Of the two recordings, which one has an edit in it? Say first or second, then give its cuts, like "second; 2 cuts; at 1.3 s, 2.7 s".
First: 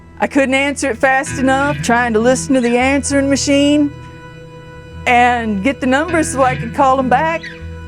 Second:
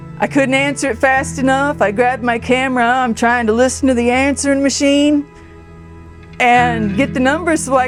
first; 1 cut; at 1.8 s